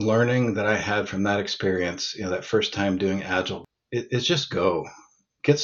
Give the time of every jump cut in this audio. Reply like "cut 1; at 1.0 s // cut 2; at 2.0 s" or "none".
cut 1; at 3.6 s